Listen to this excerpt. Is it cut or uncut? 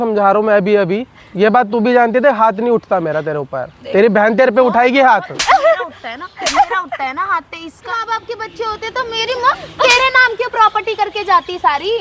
cut